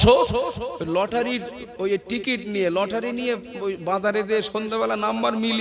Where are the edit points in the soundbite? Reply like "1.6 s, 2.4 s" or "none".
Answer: none